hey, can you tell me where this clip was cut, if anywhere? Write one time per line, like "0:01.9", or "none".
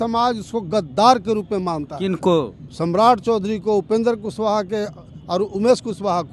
0:02.6